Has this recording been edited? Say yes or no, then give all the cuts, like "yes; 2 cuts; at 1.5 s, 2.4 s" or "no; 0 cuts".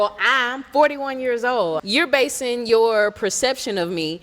yes; 1 cut; at 1.8 s